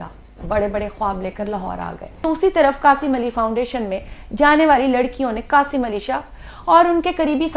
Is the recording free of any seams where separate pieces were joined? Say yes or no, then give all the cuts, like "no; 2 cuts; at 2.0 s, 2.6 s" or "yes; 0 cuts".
no; 1 cut; at 2.2 s